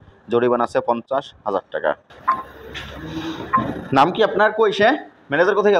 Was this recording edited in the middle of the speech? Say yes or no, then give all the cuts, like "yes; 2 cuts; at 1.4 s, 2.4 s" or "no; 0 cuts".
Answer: yes; 1 cut; at 2.1 s